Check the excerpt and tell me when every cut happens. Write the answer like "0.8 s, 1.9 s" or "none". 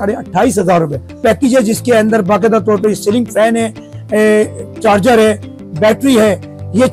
1.2 s